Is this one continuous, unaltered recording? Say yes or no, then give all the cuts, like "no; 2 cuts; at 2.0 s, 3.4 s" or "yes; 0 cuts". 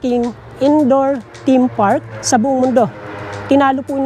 no; 1 cut; at 2.1 s